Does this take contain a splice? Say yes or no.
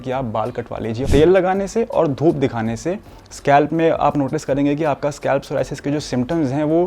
yes